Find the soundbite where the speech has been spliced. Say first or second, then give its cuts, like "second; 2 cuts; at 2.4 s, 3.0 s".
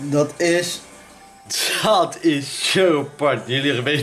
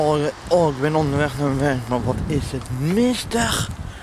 first; 1 cut; at 1.6 s